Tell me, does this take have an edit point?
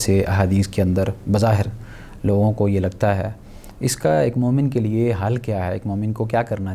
no; 0 cuts

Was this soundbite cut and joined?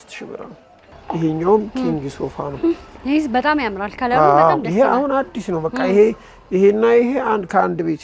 no; 0 cuts

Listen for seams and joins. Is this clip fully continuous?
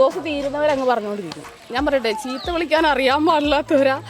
no; 1 cut; at 1.5 s

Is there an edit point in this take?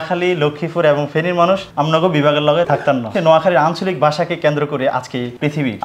yes; 1 cut; at 3.1 s

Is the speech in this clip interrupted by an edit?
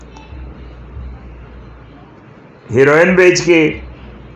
no; 0 cuts

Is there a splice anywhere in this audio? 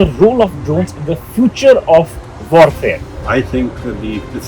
yes; 1 cut; at 3.1 s

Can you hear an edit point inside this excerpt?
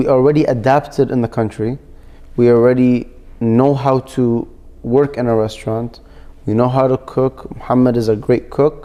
no; 0 cuts

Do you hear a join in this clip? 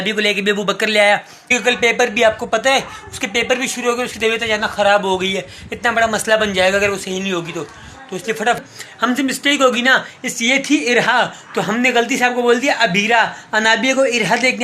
yes; 2 cuts; at 1.5 s, 8.6 s

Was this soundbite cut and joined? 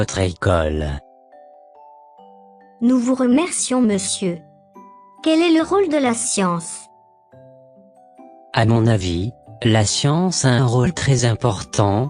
no; 0 cuts

